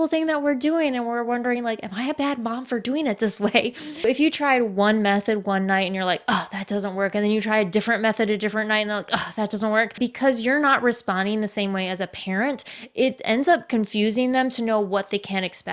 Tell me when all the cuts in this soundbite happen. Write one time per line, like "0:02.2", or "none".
0:04.0
0:10.0